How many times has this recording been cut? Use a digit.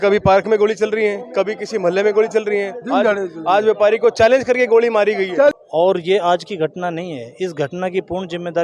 1